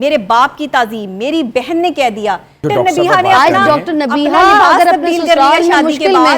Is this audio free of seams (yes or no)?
no